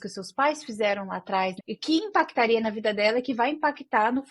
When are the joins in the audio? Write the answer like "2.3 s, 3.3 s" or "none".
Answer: 1.6 s